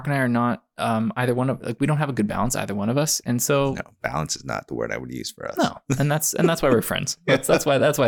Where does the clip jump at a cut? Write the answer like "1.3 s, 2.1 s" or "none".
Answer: none